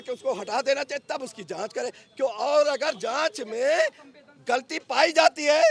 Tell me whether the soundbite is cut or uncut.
uncut